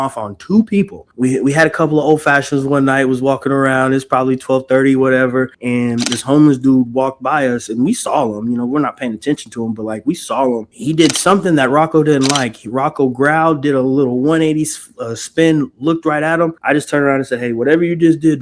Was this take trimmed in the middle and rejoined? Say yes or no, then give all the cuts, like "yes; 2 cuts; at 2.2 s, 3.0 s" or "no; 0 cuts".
yes; 4 cuts; at 1.0 s, 5.6 s, 10.7 s, 16.6 s